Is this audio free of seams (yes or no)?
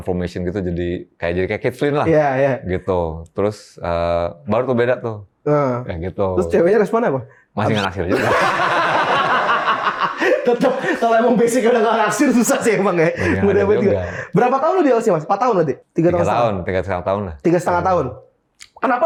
yes